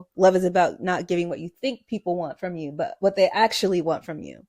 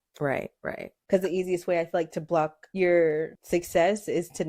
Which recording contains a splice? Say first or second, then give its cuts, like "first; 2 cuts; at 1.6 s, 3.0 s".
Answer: second; 3 cuts; at 0.9 s, 2.6 s, 3.4 s